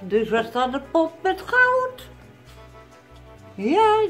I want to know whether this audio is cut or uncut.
uncut